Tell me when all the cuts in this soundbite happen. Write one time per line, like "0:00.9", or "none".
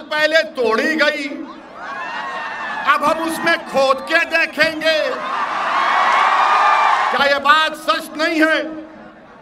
0:07.1